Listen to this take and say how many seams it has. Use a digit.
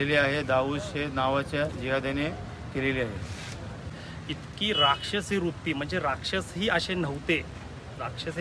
1